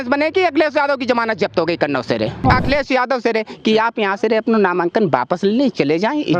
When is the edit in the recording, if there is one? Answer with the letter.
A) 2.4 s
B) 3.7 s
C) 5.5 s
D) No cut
A